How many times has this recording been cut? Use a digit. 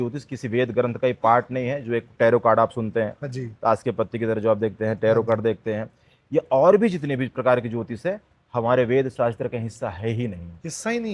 0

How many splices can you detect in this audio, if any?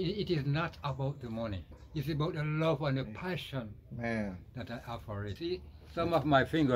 2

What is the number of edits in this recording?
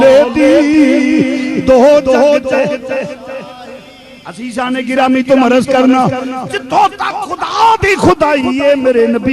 0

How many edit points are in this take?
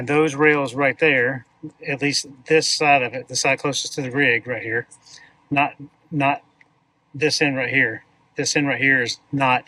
0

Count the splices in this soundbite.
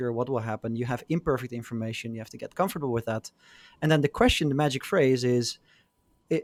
0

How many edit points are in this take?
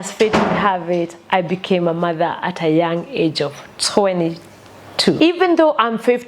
1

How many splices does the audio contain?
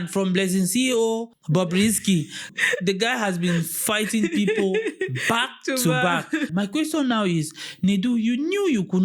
3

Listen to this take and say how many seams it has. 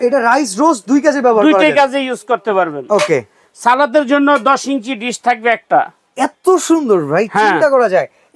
0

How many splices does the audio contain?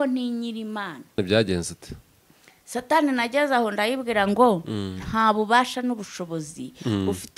1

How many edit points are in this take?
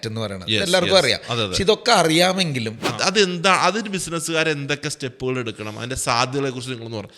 1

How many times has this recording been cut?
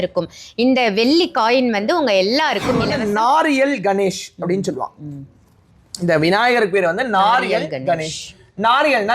1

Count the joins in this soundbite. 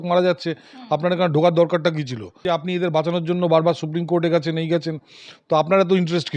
1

